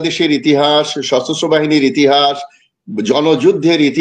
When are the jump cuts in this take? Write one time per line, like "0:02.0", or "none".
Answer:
none